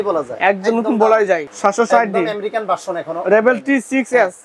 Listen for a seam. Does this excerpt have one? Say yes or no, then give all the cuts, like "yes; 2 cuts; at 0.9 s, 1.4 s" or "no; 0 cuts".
yes; 1 cut; at 1.5 s